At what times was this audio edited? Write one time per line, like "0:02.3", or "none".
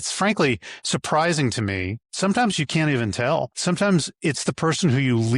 0:02.0
0:03.5